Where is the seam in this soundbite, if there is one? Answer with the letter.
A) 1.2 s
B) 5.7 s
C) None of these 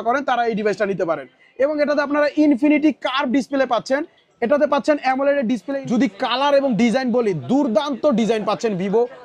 B